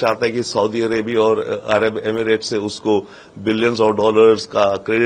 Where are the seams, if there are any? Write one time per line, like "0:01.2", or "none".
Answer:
none